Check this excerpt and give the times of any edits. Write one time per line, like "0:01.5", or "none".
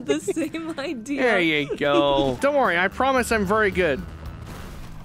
0:02.4